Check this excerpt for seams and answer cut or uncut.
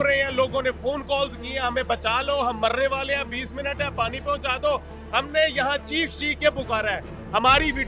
uncut